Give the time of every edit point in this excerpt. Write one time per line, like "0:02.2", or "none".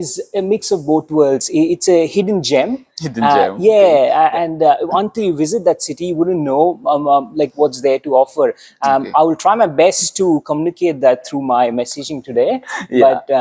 none

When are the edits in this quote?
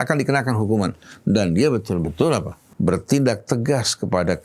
0:02.6

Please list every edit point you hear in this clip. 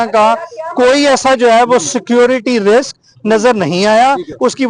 none

